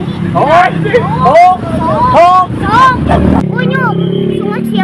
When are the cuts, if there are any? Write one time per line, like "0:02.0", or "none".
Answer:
0:03.4